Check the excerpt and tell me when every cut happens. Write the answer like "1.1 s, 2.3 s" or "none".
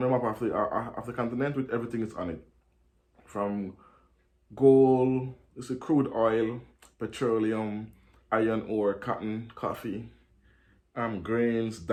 none

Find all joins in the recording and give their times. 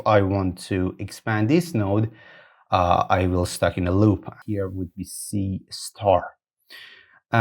4.4 s

